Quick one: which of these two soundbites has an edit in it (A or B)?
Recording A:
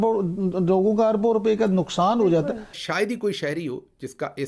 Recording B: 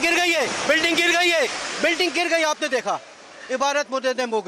A